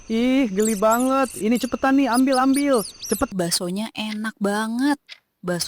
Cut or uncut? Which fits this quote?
cut